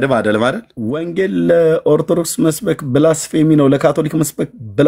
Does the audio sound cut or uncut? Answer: cut